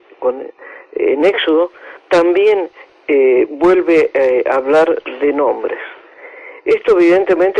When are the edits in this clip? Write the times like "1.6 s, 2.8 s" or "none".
6.5 s